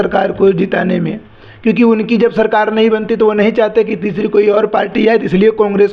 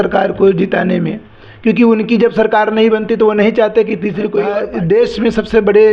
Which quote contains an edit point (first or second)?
second